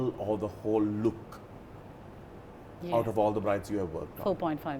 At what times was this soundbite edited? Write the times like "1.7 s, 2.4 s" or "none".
none